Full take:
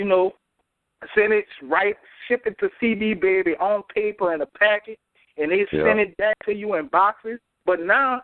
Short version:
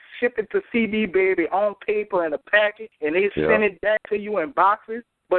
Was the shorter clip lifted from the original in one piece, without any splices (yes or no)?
no